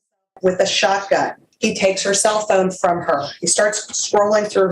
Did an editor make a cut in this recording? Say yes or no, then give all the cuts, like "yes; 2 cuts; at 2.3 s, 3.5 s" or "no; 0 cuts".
yes; 1 cut; at 1.4 s